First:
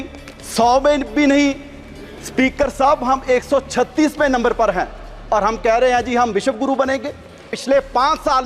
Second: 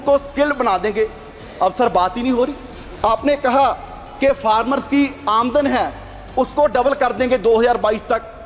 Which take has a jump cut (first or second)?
first